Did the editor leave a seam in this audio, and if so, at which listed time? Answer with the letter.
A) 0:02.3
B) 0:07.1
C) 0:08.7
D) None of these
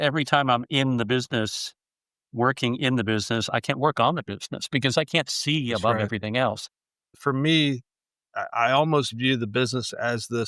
B